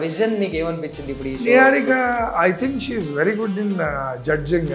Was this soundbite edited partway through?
no; 0 cuts

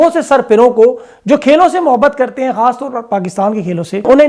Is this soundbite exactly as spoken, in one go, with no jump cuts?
yes; 0 cuts

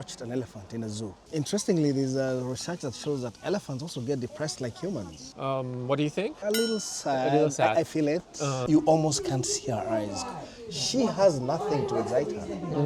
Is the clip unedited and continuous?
no; 3 cuts; at 1.2 s, 5.2 s, 8.6 s

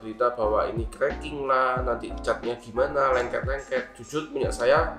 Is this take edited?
no; 0 cuts

